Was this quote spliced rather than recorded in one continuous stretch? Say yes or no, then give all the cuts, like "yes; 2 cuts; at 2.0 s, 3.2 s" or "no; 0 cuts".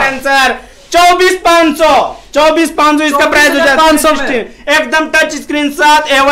no; 0 cuts